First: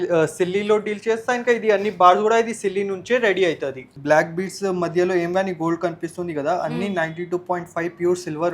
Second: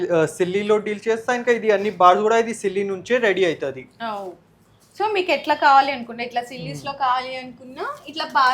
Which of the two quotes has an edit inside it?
first; 1 cut; at 4.0 s

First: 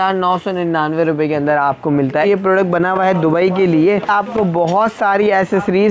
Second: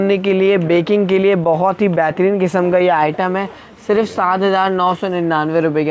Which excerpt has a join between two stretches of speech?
first; 2 cuts; at 2.3 s, 4.1 s

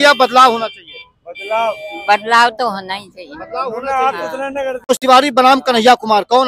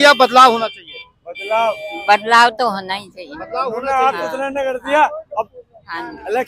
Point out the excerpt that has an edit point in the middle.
first; 1 cut; at 4.9 s

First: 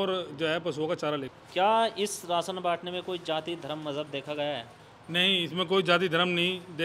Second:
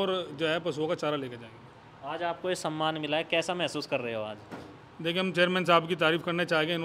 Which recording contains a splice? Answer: first; 1 cut; at 1.4 s

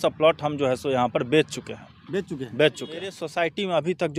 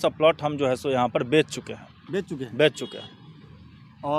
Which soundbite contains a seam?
first; 1 cut; at 3.2 s

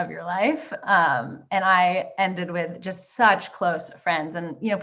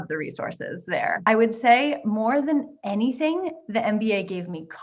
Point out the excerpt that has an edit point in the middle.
second; 1 cut; at 1.2 s

